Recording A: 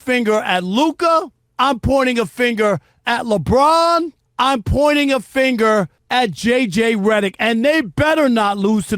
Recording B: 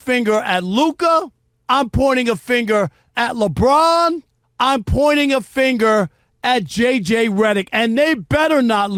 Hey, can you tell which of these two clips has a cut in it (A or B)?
A